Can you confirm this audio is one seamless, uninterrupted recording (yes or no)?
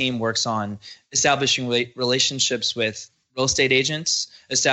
yes